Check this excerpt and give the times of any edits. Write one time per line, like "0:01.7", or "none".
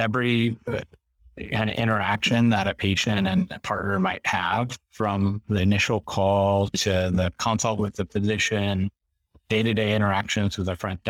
none